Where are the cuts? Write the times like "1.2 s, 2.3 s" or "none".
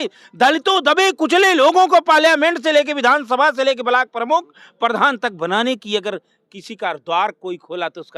none